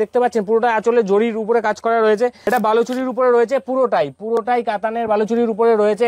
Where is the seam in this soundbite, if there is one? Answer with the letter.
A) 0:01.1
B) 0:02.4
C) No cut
B